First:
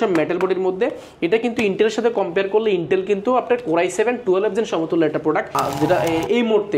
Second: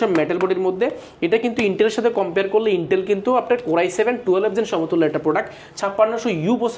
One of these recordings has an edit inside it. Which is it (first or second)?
first